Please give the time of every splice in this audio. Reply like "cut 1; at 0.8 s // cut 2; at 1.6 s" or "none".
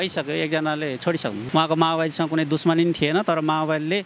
cut 1; at 1.4 s